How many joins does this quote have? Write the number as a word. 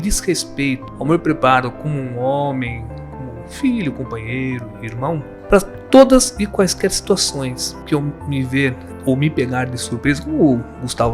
four